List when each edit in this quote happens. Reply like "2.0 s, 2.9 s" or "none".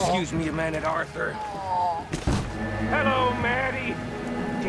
2.6 s